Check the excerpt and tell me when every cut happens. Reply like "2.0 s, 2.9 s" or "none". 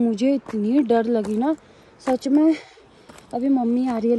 none